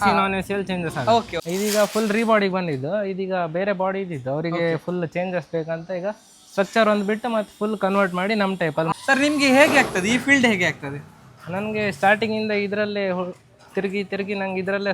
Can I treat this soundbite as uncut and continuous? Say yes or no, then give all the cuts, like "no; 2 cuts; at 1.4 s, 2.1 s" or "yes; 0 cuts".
no; 2 cuts; at 1.4 s, 8.9 s